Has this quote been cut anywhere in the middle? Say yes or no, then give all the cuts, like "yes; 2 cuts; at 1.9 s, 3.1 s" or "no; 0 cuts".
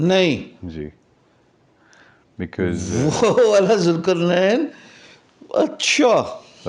no; 0 cuts